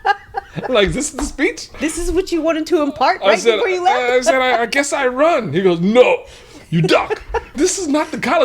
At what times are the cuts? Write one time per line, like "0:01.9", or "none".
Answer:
0:01.8
0:07.5